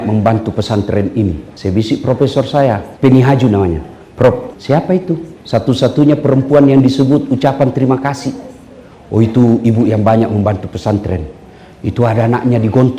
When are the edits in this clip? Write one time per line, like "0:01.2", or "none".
0:01.5
0:02.9
0:04.5
0:05.3